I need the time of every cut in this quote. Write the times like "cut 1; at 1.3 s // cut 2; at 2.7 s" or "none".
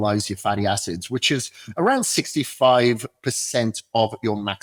none